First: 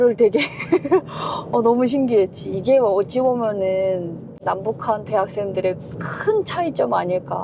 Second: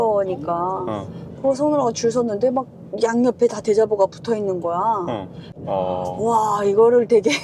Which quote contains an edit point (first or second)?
second